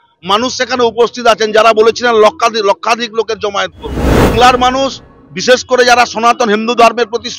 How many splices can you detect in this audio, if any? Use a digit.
1